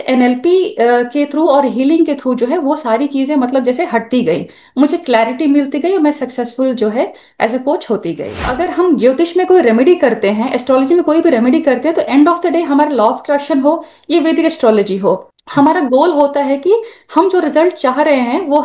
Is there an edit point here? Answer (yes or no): yes